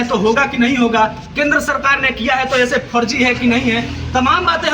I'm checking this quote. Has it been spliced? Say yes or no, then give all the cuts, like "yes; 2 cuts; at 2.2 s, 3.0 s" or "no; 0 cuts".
no; 0 cuts